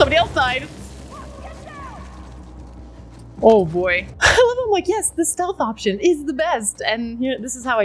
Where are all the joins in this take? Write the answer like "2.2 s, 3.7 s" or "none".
none